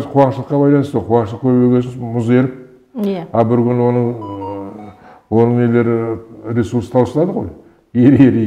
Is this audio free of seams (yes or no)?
yes